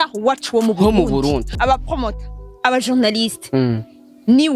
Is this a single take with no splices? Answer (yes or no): no